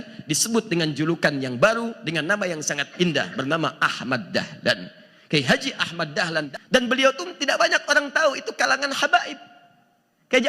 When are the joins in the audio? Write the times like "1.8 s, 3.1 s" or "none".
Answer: 6.5 s